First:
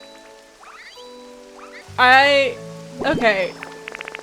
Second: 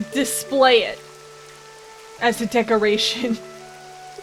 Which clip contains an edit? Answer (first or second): first